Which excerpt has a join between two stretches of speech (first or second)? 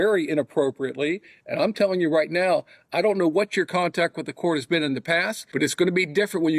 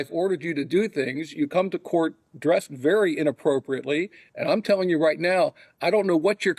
first